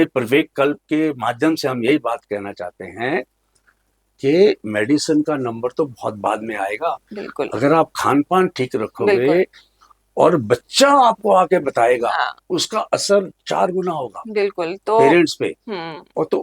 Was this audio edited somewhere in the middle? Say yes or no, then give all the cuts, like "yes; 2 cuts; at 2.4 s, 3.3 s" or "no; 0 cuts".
no; 0 cuts